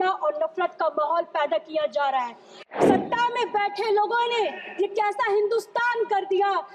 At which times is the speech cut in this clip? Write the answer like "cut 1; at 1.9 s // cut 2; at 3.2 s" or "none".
cut 1; at 2.5 s